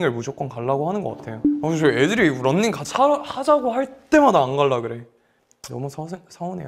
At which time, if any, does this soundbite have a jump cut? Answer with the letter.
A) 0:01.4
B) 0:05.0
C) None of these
A